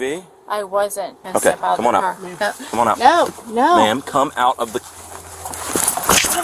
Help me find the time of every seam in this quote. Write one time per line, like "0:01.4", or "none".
0:01.2